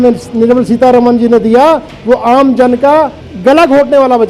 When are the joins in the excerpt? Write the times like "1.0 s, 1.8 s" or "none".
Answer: 3.2 s